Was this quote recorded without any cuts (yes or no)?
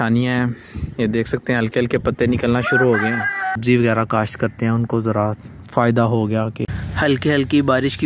no